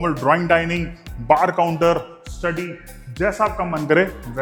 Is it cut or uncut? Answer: uncut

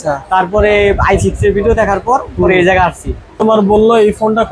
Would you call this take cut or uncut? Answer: cut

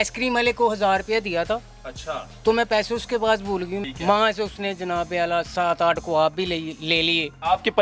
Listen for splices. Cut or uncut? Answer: cut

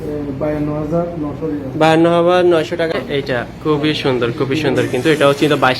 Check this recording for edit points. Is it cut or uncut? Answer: cut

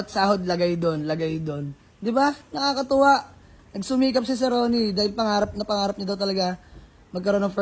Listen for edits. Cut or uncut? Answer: uncut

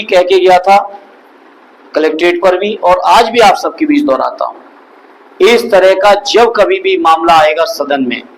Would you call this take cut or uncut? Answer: uncut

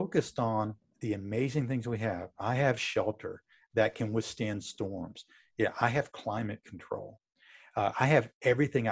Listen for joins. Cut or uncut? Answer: uncut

